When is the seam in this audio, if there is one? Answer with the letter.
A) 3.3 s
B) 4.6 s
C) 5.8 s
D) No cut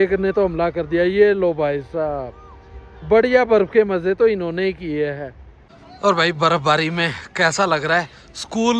C